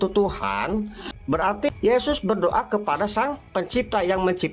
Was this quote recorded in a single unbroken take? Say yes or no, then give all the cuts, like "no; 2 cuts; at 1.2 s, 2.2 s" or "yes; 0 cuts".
yes; 0 cuts